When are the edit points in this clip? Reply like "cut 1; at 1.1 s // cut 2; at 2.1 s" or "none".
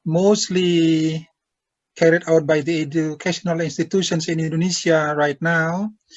none